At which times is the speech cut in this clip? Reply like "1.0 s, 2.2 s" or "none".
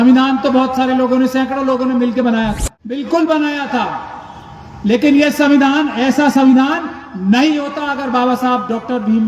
3.0 s